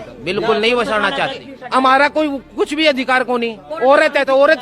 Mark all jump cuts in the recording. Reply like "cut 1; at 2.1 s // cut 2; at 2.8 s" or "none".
cut 1; at 1.4 s